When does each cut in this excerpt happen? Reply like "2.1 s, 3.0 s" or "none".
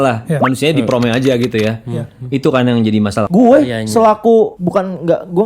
3.3 s, 4.6 s